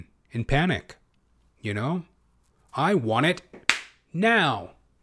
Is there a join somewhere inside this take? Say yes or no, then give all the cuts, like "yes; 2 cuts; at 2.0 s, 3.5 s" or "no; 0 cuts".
no; 0 cuts